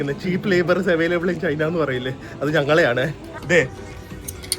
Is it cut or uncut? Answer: cut